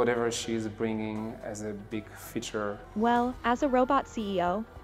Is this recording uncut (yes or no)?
no